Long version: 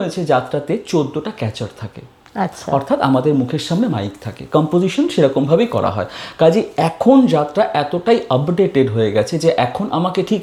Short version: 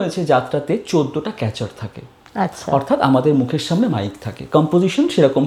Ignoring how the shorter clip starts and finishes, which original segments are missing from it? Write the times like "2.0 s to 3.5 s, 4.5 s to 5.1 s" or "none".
none